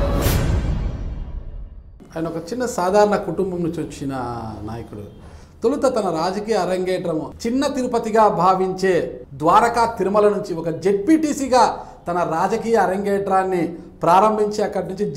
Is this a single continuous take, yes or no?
no